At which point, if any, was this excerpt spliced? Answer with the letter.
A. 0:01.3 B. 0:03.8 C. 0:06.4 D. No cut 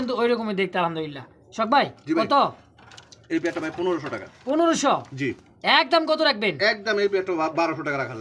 D